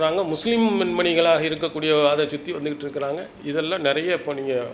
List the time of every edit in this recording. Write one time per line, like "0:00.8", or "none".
none